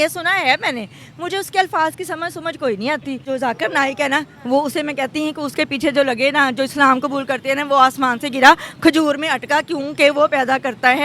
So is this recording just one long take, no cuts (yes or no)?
no